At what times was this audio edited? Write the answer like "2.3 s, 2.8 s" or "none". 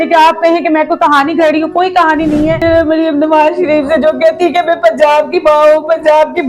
2.6 s

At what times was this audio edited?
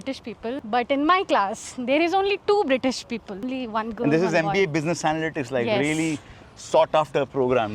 none

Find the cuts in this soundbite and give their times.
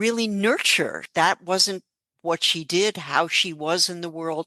1.0 s

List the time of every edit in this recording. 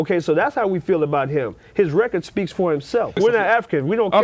3.2 s

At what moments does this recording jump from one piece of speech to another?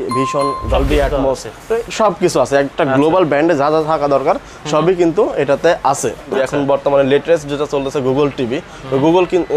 6.3 s

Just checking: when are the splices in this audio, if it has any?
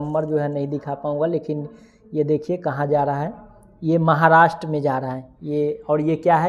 none

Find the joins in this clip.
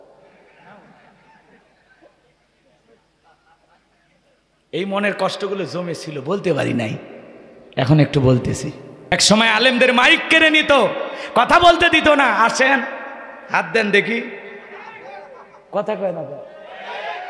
9.1 s

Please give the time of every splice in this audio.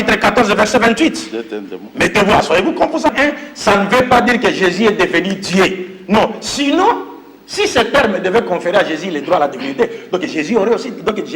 3.1 s

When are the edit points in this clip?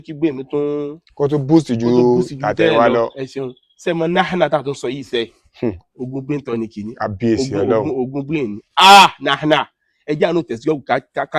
none

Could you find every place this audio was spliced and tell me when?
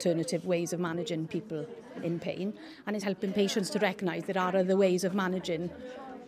3.0 s

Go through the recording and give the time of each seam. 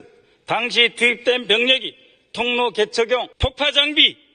3.3 s

